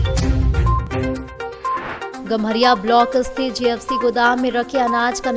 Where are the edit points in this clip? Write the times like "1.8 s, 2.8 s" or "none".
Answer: 2.1 s